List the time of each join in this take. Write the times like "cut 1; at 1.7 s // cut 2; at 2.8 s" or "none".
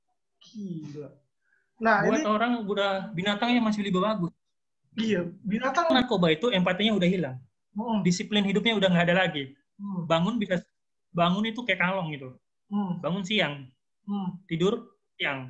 cut 1; at 6.0 s